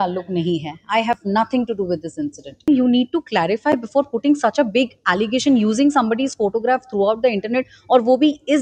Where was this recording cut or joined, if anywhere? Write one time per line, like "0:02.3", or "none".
0:02.7